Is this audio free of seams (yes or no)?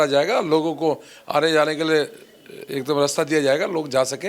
yes